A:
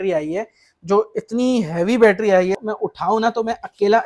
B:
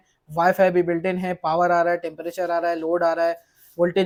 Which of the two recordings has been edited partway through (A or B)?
A